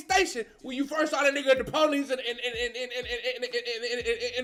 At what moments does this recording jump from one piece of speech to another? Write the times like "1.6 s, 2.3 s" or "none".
none